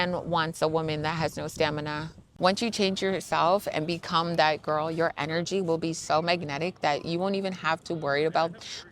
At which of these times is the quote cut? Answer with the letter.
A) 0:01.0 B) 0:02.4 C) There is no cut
B